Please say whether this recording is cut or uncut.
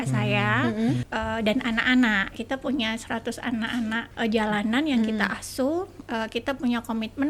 cut